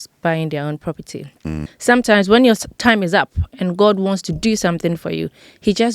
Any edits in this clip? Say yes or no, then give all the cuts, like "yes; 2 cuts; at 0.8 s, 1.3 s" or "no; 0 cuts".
yes; 1 cut; at 1.7 s